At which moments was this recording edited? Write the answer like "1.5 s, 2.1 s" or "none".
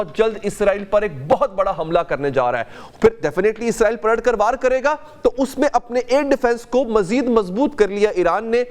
none